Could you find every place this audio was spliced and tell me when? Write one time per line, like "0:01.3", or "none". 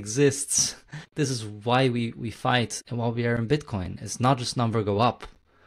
0:01.1
0:02.8